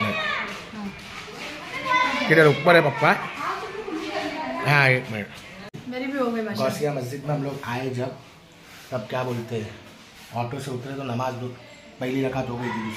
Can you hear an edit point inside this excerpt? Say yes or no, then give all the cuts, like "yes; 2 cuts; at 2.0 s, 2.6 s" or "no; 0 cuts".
yes; 1 cut; at 5.8 s